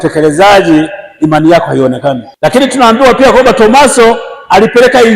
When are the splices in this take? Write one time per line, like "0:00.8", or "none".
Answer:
0:02.3